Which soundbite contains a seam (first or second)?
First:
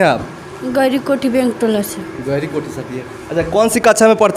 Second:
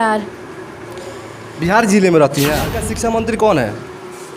second